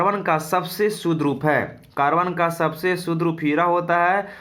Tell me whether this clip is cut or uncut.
uncut